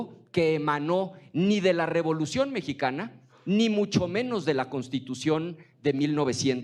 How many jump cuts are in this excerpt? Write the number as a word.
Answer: zero